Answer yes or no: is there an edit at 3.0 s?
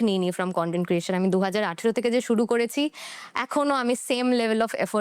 no